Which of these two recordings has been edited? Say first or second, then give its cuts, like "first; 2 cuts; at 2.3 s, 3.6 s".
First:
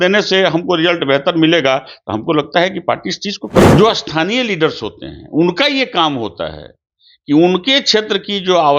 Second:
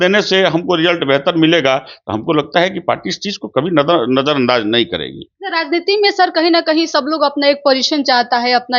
first; 1 cut; at 3.6 s